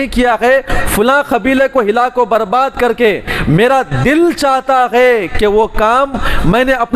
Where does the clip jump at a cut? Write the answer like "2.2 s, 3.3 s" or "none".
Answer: none